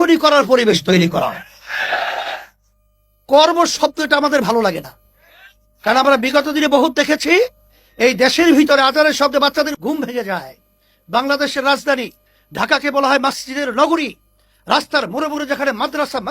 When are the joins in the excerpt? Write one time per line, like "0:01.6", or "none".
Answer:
0:09.7